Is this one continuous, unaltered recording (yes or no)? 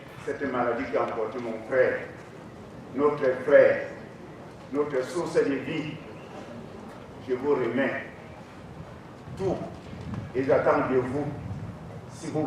yes